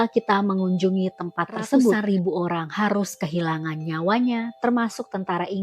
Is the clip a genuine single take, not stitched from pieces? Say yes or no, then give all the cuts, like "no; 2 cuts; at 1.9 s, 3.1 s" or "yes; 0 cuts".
no; 1 cut; at 2.0 s